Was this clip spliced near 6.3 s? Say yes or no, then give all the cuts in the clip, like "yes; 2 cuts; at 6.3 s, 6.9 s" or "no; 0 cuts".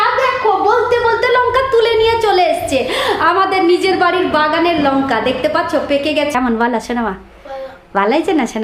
yes; 1 cut; at 6.3 s